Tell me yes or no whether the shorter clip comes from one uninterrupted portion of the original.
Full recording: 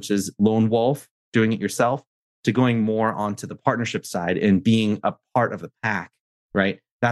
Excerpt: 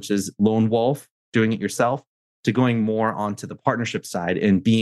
yes